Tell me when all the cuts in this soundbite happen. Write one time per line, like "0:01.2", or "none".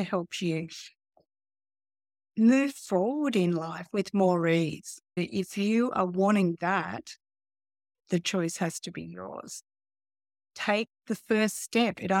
0:05.2